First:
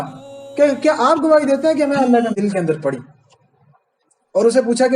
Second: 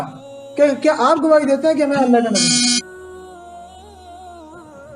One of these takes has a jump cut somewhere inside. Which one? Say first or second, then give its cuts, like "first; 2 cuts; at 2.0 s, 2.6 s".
first; 1 cut; at 2.4 s